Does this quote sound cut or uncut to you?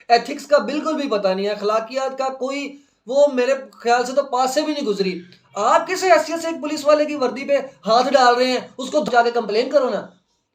cut